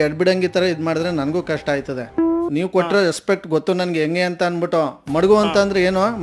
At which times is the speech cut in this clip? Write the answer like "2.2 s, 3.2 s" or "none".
2.5 s